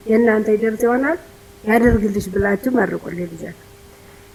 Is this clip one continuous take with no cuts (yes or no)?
yes